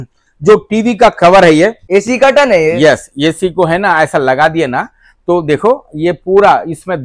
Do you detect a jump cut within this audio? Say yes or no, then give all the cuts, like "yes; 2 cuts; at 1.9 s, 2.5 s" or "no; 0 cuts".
yes; 1 cut; at 1.8 s